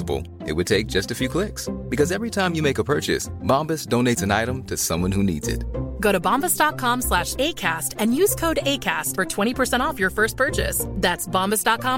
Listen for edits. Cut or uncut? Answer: uncut